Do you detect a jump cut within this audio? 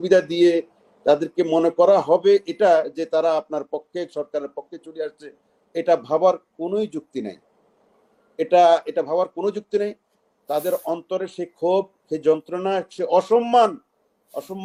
no; 0 cuts

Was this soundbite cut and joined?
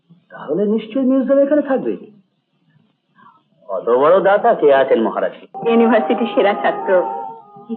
yes; 1 cut; at 5.5 s

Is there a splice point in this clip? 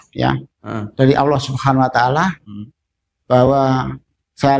no; 0 cuts

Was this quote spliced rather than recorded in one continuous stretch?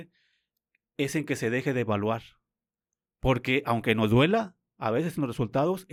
no; 0 cuts

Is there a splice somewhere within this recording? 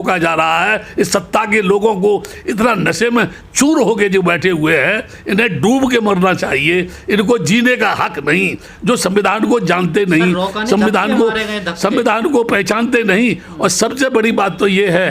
no; 0 cuts

